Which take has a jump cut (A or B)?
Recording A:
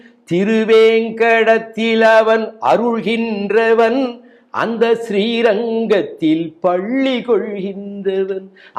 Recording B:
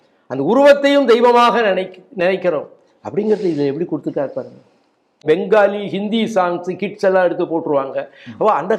B